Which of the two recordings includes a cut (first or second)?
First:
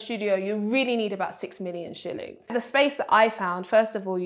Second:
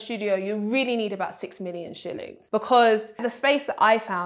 first